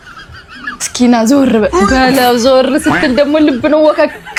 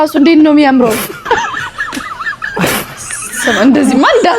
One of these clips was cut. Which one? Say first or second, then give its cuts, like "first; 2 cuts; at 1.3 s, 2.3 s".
second; 2 cuts; at 1.1 s, 3.3 s